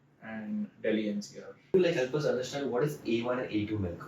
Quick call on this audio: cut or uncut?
cut